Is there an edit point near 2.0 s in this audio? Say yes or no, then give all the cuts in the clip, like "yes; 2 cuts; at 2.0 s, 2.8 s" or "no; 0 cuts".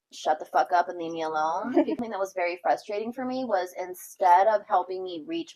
yes; 1 cut; at 2.0 s